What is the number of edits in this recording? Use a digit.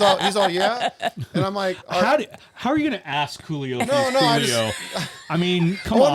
0